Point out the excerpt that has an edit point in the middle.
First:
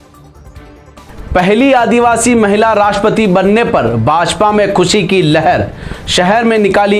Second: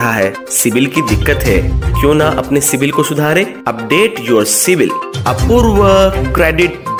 first; 1 cut; at 1.0 s

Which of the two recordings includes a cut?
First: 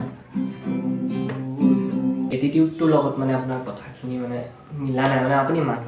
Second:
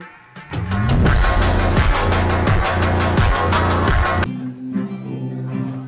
first; 1 cut; at 2.2 s

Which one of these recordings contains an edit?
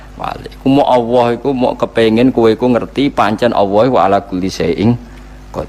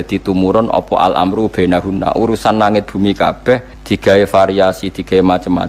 second; 1 cut; at 3.8 s

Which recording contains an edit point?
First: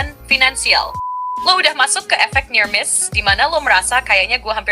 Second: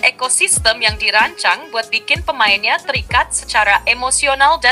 first; 1 cut; at 1.0 s

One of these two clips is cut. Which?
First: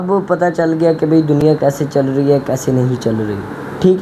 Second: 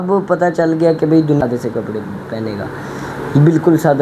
second; 1 cut; at 1.4 s

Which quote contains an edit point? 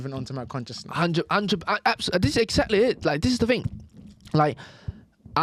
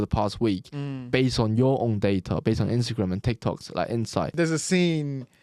second; 1 cut; at 4.3 s

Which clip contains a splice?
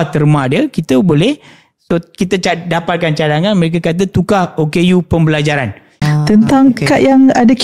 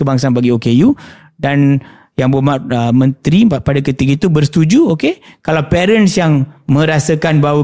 first; 1 cut; at 6.0 s

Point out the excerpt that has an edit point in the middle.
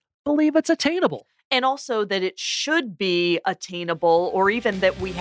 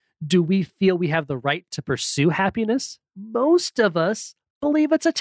second; 1 cut; at 3.0 s

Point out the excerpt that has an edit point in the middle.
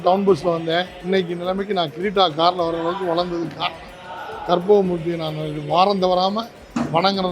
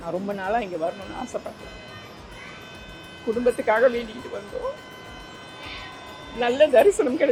first; 1 cut; at 0.9 s

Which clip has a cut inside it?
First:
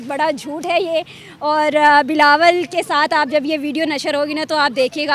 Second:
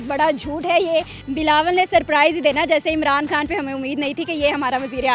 second; 1 cut; at 1.2 s

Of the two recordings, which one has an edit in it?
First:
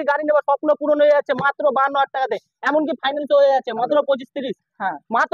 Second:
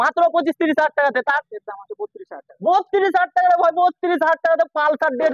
second; 1 cut; at 1.4 s

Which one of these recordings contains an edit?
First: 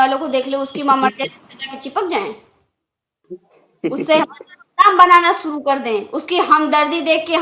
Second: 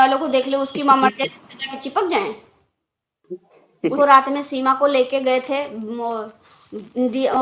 second; 1 cut; at 3.9 s

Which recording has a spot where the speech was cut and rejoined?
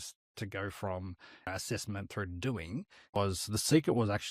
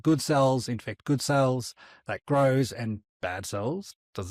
first; 2 cuts; at 1.5 s, 3.2 s

